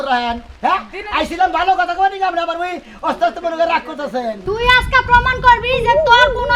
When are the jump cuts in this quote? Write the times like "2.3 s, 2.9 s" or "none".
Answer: 4.6 s